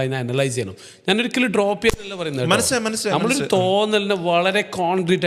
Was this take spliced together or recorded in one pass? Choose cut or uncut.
uncut